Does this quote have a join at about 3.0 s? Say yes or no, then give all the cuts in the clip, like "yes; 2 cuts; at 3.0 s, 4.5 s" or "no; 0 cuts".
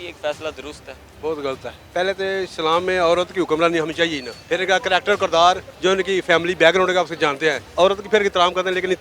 no; 4 cuts; at 1.7 s, 4.3 s, 5.7 s, 7.6 s